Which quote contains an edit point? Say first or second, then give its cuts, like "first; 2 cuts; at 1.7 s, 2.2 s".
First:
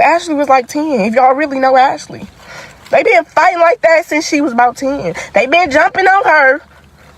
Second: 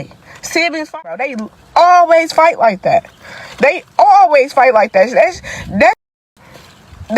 second; 1 cut; at 1.2 s